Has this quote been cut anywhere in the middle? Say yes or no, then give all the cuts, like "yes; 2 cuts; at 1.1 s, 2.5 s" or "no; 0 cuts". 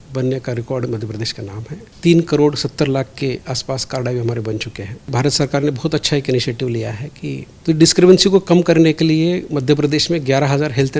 yes; 3 cuts; at 1.9 s, 5.1 s, 7.5 s